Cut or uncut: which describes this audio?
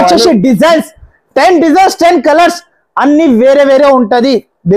uncut